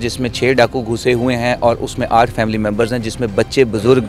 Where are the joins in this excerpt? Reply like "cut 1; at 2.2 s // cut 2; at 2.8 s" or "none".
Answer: none